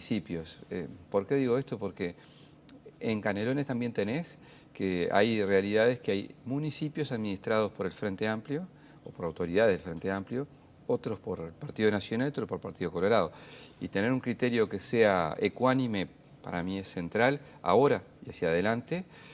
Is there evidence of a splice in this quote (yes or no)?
yes